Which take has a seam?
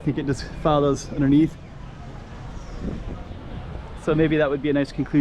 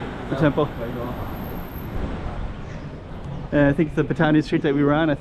second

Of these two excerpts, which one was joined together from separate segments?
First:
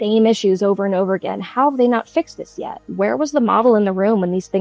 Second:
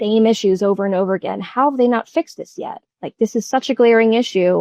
first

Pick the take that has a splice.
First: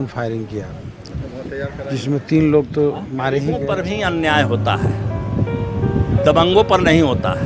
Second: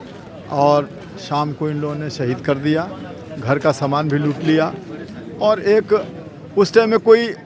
first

